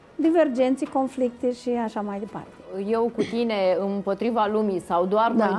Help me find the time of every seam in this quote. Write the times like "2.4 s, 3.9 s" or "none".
2.8 s